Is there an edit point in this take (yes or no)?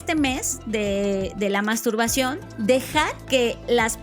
yes